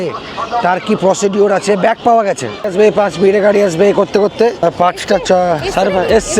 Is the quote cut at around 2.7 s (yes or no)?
yes